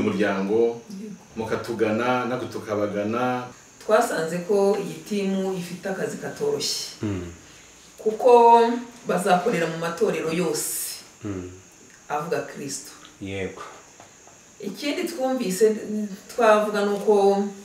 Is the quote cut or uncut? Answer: cut